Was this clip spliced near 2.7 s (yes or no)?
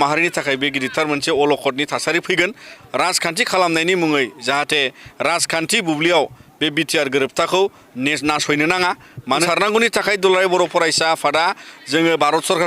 yes